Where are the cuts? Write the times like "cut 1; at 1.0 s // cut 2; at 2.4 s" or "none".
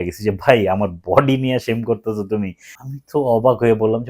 cut 1; at 2.7 s